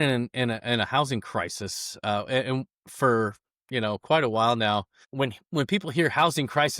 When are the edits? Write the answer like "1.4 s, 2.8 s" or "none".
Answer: 5.0 s